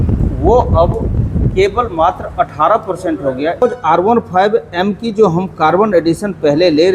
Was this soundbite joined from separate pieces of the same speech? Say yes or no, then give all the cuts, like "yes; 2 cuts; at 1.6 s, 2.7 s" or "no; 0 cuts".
yes; 1 cut; at 3.6 s